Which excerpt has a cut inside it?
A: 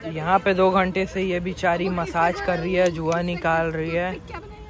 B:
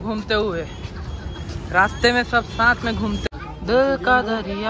B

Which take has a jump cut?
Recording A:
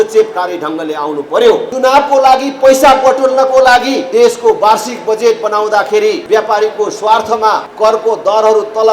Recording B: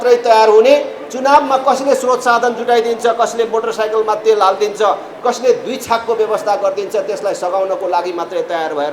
A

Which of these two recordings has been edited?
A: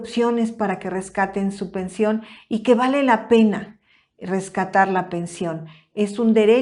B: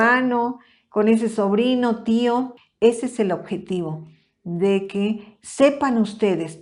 B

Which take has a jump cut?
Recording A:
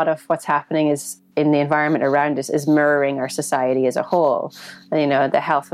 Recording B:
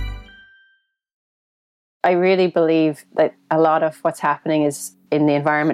B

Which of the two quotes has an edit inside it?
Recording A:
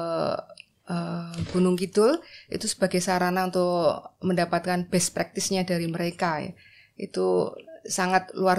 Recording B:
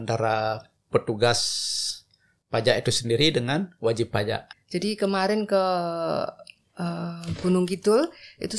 B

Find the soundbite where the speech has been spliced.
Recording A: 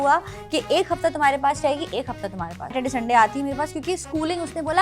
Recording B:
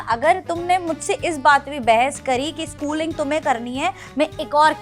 A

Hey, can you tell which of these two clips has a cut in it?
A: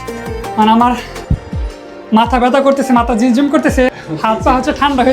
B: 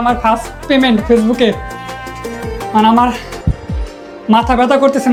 A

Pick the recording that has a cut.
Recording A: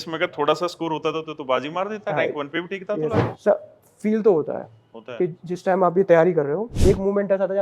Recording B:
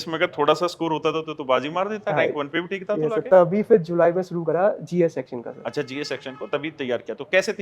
A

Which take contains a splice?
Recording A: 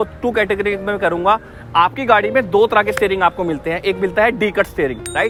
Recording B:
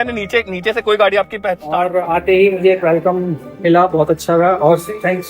B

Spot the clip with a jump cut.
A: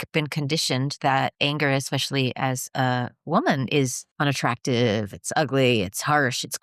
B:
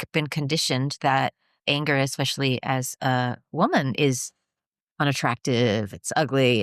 A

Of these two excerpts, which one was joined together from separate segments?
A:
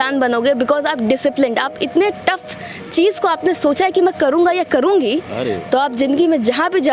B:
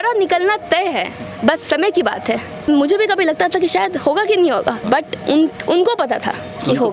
B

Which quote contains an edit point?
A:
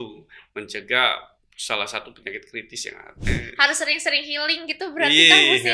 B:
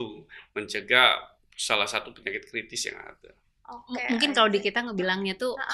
A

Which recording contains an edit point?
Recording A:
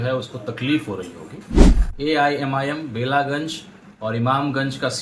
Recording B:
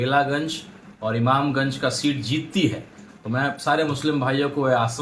A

